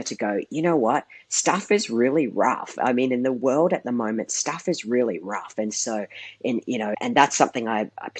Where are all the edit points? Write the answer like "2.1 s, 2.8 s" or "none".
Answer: 7.0 s